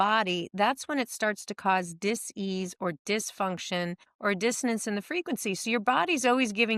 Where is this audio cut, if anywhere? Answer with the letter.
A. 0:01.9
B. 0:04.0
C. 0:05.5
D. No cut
B